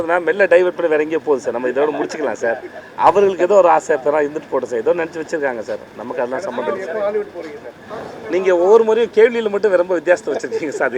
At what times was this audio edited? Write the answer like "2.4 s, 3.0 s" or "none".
7.7 s